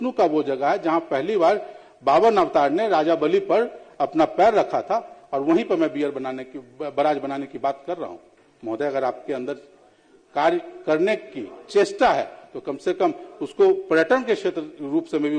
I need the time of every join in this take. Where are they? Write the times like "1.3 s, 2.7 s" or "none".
none